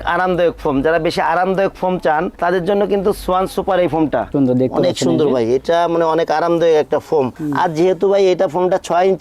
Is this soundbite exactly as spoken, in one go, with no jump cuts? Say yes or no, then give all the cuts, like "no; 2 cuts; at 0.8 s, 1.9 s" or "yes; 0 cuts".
no; 1 cut; at 4.3 s